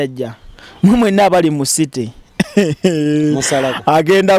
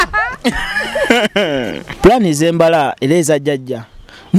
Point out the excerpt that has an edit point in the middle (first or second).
second